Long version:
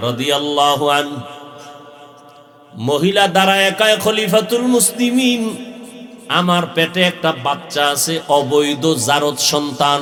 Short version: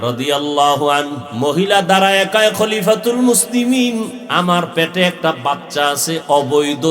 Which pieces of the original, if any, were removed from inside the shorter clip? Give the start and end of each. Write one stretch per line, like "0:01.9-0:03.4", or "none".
0:01.2-0:02.7
0:05.7-0:06.2